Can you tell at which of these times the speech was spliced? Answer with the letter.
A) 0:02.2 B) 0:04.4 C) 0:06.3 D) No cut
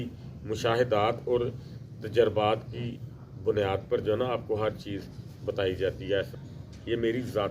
C